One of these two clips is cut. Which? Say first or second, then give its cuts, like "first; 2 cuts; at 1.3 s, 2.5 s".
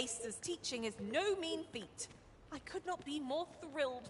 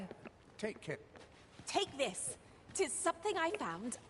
second; 1 cut; at 1.6 s